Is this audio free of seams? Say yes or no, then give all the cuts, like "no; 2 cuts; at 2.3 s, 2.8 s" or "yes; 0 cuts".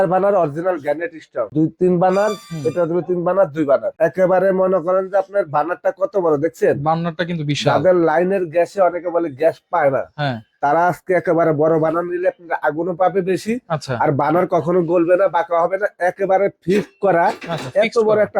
no; 2 cuts; at 1.5 s, 3.9 s